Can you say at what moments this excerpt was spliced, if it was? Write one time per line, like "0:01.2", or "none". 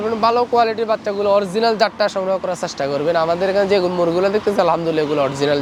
none